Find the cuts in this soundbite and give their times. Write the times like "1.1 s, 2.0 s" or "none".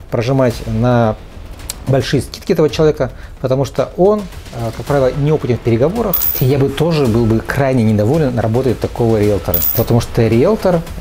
6.4 s, 9.6 s